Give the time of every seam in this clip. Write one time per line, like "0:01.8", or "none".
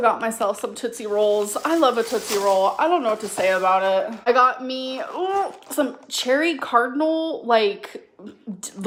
none